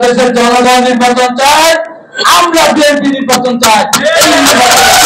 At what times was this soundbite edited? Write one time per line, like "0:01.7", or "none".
none